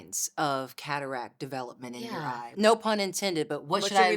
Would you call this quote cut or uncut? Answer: cut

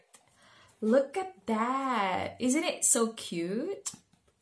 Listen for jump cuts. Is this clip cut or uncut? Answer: uncut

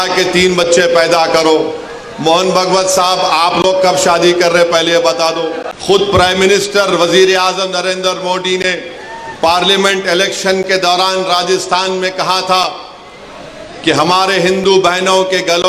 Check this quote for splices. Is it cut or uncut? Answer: cut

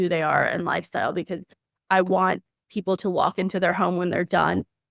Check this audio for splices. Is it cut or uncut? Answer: uncut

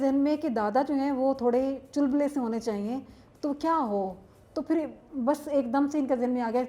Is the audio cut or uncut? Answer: uncut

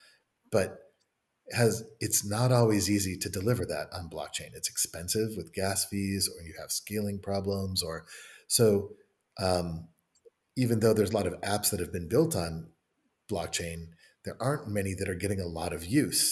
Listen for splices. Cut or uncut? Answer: uncut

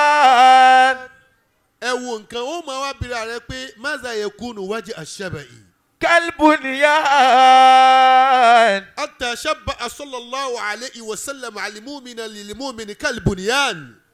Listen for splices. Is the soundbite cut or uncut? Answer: uncut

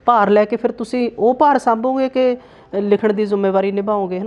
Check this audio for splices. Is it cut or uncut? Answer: uncut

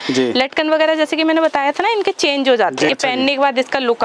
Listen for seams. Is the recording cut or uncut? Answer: cut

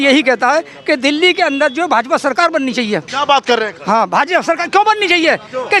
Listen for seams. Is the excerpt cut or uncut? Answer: uncut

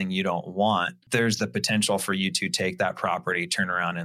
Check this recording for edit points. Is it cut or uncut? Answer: cut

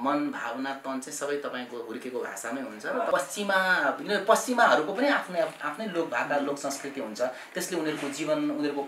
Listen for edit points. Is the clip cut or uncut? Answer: cut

